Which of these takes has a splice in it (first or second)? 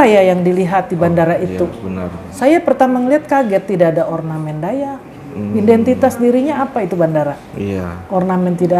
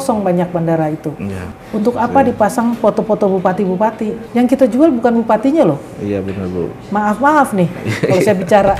second